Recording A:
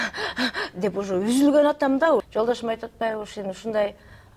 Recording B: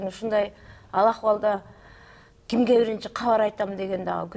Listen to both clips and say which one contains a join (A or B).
A